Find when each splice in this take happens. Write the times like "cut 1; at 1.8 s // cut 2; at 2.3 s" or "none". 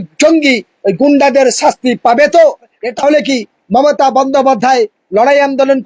cut 1; at 2.8 s